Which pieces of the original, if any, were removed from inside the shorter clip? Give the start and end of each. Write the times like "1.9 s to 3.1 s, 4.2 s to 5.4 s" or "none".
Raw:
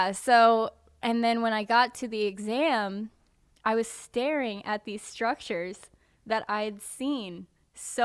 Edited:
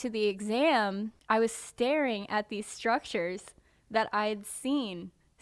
3.1 s to 3.5 s